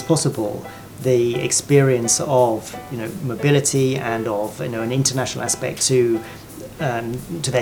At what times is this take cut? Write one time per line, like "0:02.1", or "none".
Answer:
none